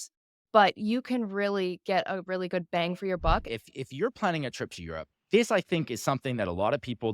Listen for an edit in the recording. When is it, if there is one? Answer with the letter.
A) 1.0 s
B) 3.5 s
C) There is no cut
B